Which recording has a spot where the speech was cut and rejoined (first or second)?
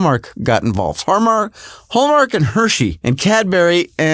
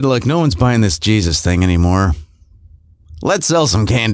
first